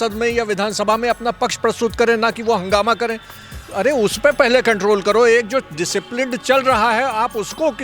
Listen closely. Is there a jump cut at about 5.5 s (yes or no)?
no